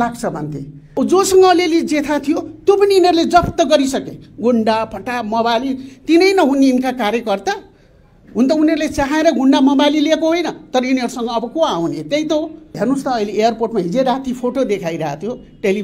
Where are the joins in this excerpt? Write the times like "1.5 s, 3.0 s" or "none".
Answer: 0.9 s, 12.7 s